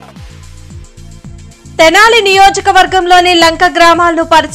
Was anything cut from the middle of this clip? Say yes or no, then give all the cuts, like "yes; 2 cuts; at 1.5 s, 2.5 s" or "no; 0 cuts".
no; 0 cuts